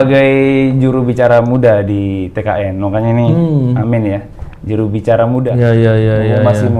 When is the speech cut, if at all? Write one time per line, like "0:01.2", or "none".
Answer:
0:05.5